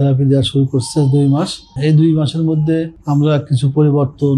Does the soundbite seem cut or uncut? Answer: cut